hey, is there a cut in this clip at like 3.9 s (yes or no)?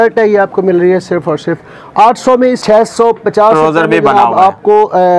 no